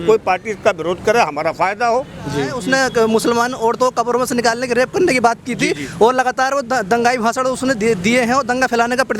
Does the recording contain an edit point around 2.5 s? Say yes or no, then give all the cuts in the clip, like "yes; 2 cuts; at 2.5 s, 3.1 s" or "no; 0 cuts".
yes; 1 cut; at 2.5 s